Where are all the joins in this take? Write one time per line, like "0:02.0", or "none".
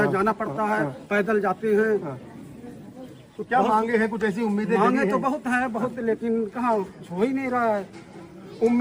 none